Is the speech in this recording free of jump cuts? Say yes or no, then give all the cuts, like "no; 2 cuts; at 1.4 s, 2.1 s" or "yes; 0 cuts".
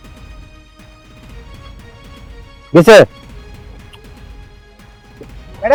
yes; 0 cuts